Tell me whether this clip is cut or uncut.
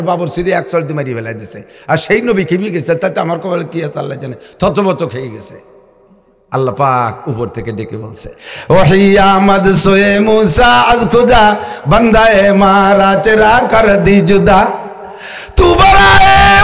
uncut